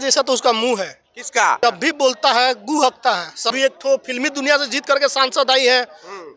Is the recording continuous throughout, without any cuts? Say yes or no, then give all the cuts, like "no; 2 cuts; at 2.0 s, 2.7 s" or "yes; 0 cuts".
no; 2 cuts; at 1.6 s, 3.5 s